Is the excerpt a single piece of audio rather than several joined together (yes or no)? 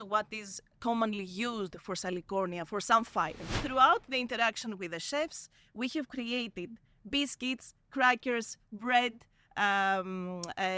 no